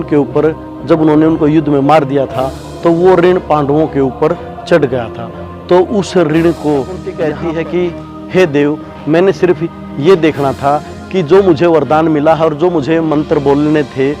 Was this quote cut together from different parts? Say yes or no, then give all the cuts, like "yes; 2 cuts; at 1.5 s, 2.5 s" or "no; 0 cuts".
yes; 1 cut; at 7.0 s